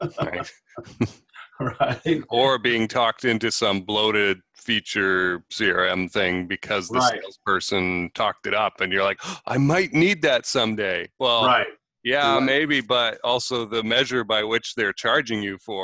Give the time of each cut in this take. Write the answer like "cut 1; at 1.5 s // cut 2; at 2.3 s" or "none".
none